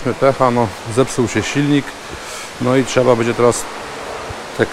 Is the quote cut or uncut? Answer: uncut